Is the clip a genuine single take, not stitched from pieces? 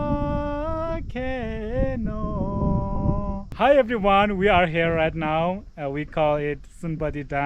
no; 1 cut; at 3.5 s

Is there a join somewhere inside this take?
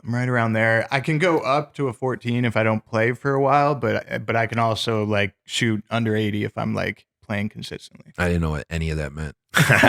no; 0 cuts

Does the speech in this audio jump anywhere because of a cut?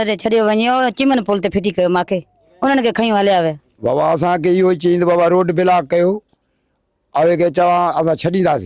yes; 1 cut; at 3.7 s

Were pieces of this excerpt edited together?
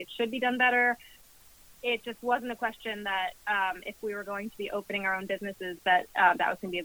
yes; 1 cut; at 1.2 s

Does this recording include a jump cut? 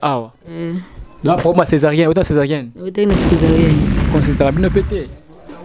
yes; 1 cut; at 4.1 s

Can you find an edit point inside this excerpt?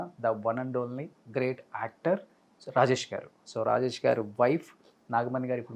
yes; 1 cut; at 3.5 s

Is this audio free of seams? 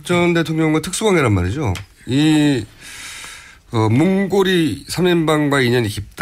no; 1 cut; at 3.5 s

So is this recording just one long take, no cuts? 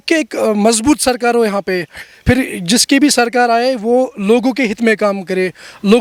yes; 0 cuts

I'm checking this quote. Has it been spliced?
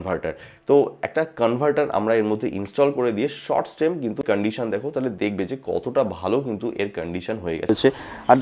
yes; 2 cuts; at 4.2 s, 7.7 s

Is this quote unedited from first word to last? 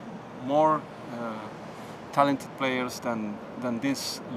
yes; 0 cuts

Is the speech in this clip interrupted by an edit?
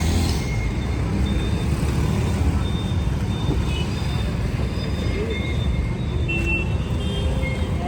no; 0 cuts

